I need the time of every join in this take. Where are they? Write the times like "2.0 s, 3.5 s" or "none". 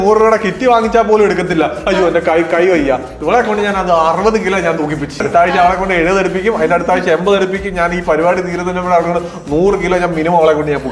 5.3 s